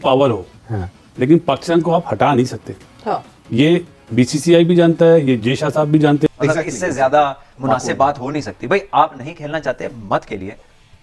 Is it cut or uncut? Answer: cut